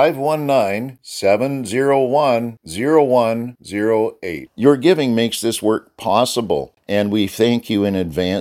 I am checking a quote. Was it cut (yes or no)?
yes